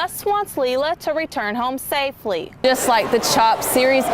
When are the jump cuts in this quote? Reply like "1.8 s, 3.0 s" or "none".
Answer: 2.5 s